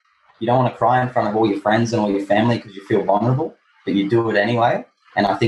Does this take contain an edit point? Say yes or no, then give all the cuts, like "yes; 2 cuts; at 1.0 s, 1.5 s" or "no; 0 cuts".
no; 0 cuts